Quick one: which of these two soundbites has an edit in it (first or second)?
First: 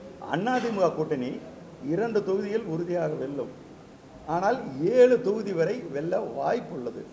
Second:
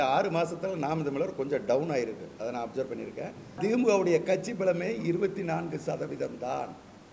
second